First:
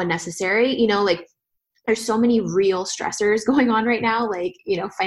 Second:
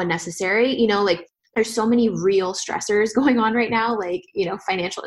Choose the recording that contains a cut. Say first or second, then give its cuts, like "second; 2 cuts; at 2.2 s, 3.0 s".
second; 1 cut; at 1.4 s